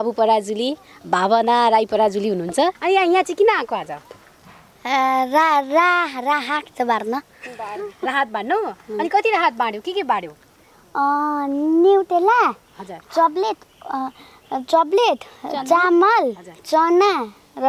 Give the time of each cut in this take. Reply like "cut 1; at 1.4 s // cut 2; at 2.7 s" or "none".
cut 1; at 2.8 s